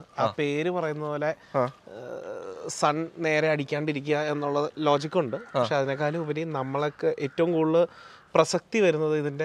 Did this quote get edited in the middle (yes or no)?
no